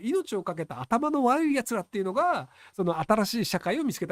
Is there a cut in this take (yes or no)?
no